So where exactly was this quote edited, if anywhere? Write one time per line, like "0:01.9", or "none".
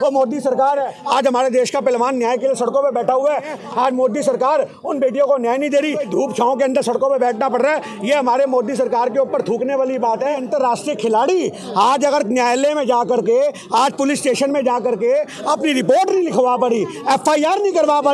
0:01.0
0:03.6
0:06.0
0:10.4